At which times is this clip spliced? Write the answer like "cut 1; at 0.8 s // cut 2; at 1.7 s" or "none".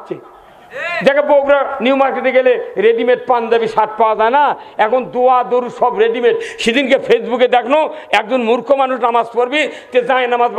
none